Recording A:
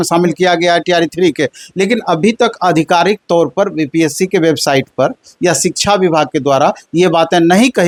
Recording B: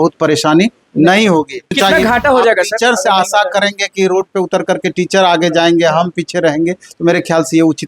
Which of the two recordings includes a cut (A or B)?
B